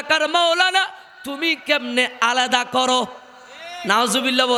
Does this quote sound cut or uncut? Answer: uncut